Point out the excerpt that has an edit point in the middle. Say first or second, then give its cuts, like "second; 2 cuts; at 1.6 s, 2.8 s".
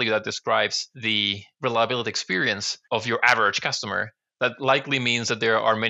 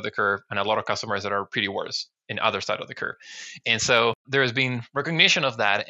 second; 1 cut; at 4.2 s